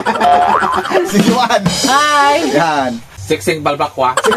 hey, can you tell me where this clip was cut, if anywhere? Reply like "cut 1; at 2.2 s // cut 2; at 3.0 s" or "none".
cut 1; at 3.1 s